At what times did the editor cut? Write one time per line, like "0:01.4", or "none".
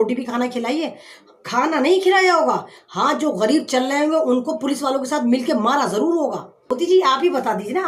0:06.7